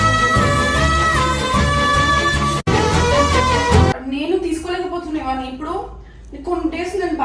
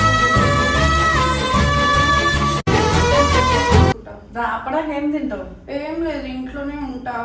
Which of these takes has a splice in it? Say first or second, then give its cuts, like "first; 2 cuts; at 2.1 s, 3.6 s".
first; 1 cut; at 4.0 s